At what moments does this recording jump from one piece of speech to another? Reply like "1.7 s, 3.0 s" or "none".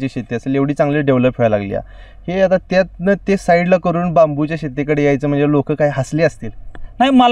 none